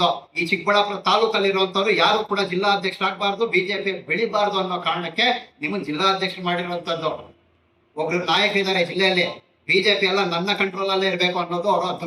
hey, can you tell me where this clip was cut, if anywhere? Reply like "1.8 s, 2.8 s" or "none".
none